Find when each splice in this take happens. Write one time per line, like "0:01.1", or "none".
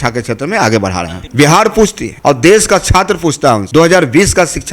0:01.2
0:02.1
0:03.6